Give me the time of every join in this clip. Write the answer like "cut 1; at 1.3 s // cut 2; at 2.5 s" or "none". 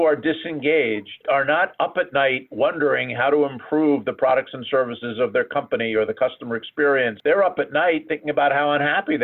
cut 1; at 1.2 s // cut 2; at 7.2 s